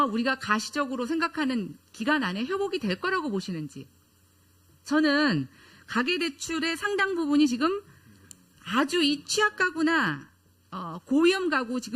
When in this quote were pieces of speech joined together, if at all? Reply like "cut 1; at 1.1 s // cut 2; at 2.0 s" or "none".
cut 1; at 6.3 s